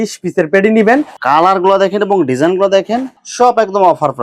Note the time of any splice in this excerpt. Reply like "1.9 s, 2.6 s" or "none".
1.1 s